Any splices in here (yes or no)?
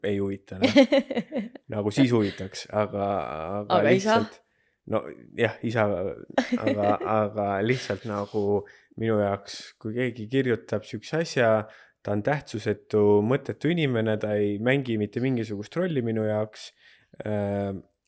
no